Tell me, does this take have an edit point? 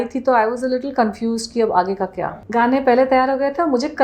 yes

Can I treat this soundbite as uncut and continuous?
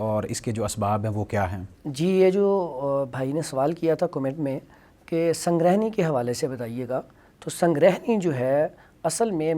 yes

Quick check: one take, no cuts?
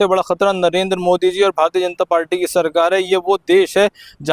yes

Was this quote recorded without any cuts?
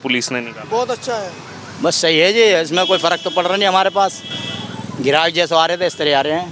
yes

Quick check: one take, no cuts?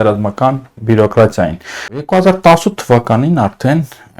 no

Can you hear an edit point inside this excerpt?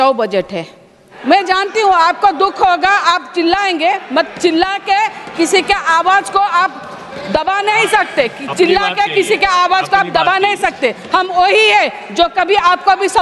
yes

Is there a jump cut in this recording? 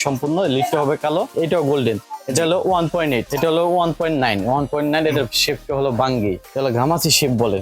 yes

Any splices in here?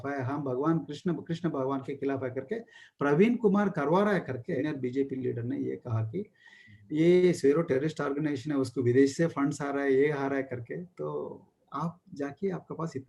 yes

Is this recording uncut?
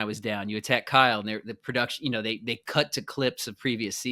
yes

